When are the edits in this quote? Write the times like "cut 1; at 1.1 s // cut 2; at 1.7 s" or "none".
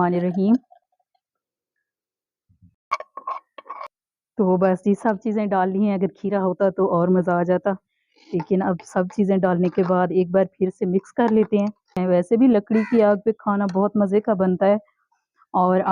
cut 1; at 3.9 s // cut 2; at 12.0 s